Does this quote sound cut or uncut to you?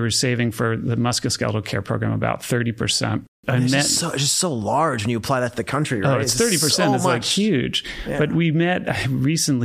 cut